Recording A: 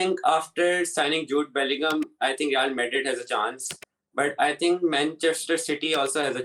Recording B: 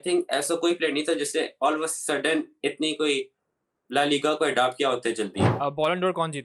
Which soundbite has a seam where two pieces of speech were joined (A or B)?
B